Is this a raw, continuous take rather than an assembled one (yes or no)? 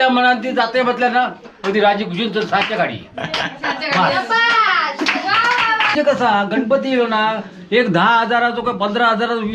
no